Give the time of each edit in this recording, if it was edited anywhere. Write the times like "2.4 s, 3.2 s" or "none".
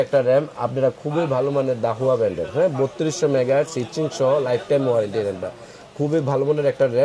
none